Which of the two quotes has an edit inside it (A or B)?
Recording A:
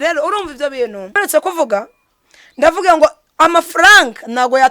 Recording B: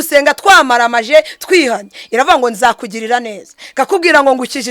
A